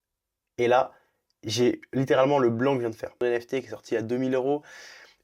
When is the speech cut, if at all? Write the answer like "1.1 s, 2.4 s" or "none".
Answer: 3.2 s